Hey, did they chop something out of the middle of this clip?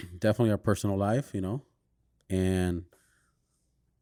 no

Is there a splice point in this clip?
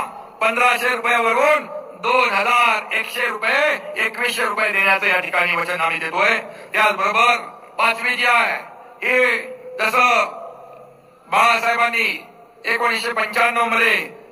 no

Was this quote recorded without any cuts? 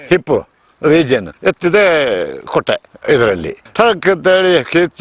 no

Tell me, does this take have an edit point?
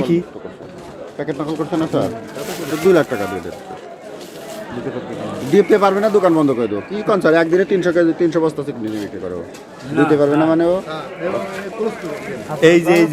no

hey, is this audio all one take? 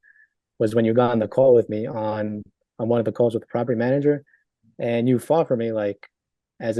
yes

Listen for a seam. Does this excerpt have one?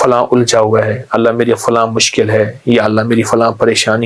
no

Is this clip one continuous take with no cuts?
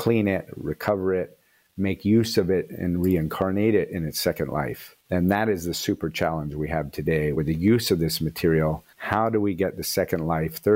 yes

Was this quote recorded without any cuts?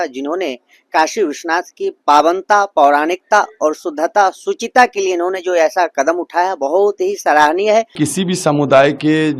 no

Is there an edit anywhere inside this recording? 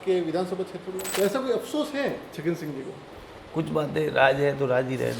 yes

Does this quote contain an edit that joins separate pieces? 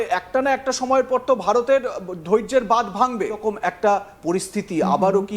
yes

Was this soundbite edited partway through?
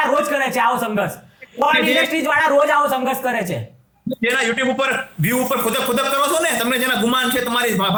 no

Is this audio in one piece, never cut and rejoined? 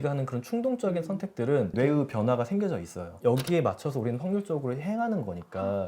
no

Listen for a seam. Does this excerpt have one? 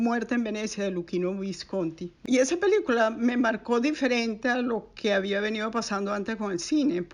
yes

